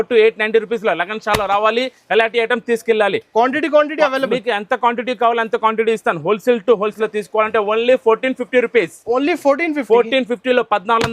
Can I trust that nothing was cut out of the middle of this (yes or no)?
no